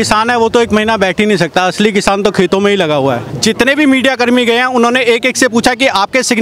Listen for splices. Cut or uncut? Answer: cut